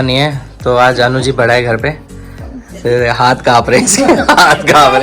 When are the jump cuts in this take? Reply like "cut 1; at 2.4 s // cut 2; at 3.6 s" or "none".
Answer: none

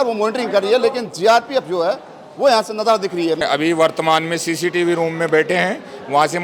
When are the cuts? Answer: cut 1; at 3.4 s

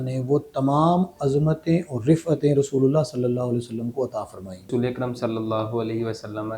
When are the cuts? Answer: cut 1; at 4.7 s

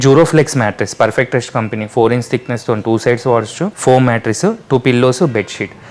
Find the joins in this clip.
cut 1; at 3.7 s

